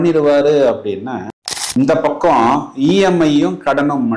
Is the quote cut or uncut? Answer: cut